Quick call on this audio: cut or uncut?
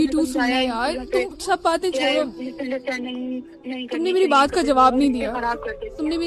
uncut